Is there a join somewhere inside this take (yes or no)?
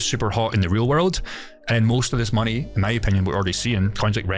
no